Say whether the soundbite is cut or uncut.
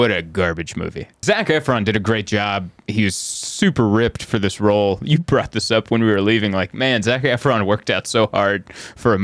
cut